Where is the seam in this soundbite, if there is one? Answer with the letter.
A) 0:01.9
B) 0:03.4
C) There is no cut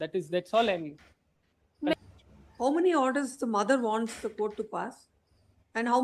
A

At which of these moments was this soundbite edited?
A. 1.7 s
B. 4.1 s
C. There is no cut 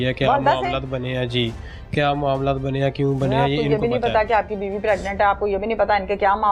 C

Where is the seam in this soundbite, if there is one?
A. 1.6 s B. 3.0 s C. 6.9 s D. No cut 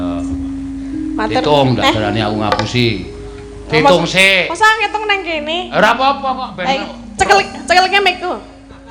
D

